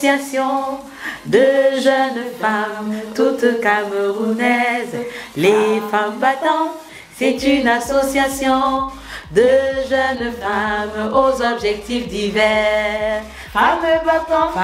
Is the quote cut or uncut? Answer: uncut